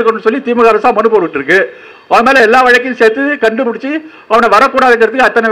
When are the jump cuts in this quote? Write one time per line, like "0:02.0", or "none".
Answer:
none